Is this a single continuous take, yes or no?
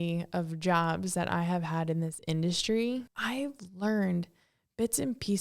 no